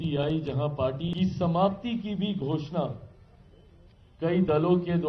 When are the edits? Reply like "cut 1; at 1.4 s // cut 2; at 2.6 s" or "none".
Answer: cut 1; at 1.1 s